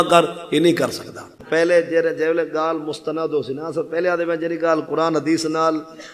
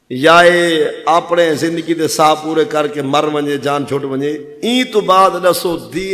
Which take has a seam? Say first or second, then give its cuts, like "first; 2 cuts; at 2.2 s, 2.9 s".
first; 1 cut; at 1.4 s